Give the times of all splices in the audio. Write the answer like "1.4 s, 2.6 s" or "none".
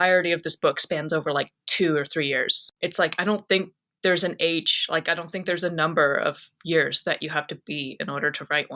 2.6 s